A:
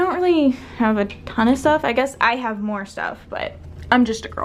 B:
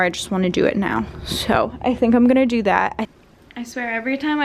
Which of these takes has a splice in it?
B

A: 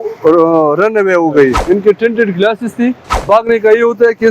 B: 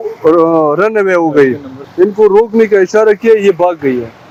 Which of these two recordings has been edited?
A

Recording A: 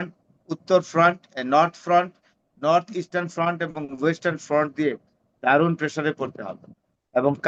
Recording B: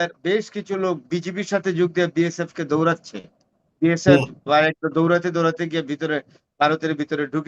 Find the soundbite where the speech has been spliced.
B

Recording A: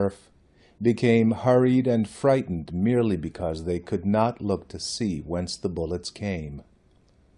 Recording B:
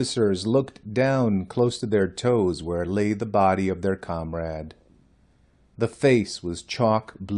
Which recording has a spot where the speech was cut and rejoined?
B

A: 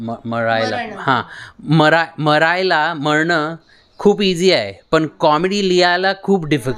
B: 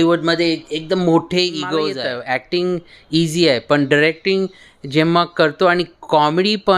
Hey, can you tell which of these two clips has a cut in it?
B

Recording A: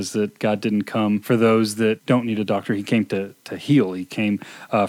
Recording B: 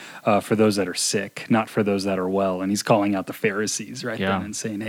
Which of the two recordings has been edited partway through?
A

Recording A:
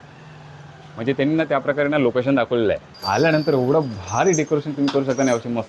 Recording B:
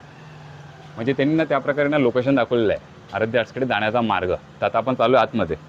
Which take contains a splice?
A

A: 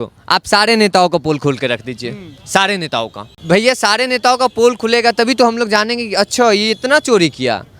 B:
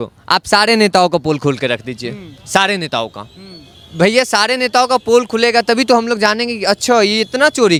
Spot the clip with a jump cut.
A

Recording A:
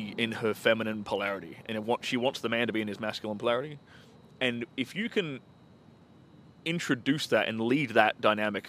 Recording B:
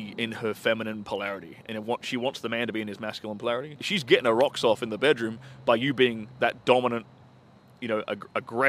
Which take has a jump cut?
B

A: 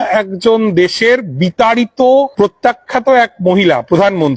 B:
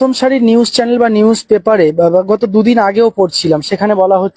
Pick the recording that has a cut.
A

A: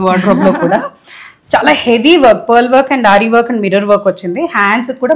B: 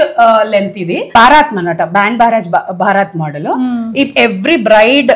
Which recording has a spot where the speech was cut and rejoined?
B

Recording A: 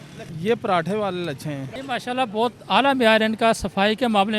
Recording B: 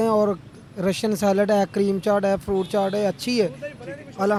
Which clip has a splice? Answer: A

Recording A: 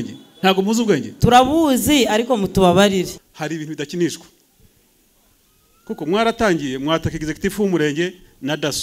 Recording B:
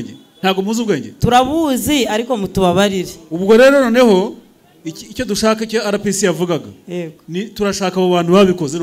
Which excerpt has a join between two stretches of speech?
A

